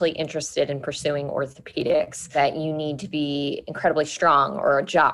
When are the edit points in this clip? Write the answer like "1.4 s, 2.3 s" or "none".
2.2 s